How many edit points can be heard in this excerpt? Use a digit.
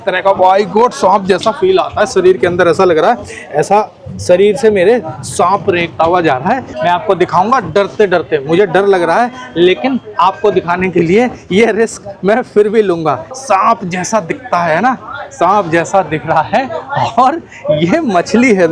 2